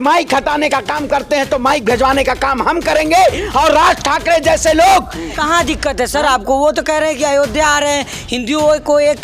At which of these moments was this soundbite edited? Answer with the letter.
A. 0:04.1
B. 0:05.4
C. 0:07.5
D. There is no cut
B